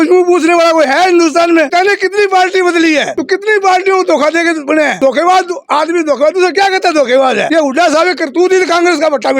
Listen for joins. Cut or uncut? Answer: cut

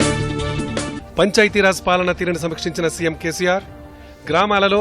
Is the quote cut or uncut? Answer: cut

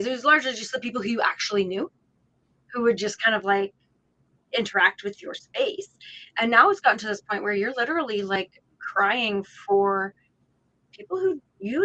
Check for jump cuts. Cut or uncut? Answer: uncut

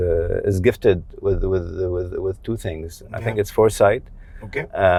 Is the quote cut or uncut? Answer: uncut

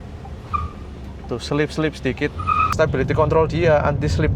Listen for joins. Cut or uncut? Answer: cut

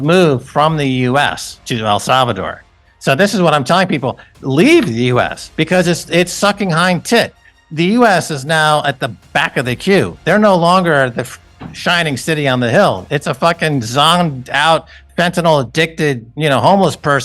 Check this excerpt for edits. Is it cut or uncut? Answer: cut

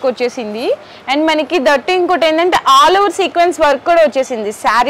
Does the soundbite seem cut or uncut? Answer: uncut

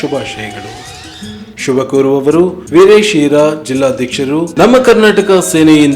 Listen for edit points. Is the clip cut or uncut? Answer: cut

